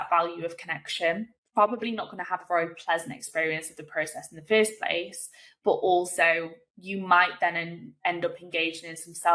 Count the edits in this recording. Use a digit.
1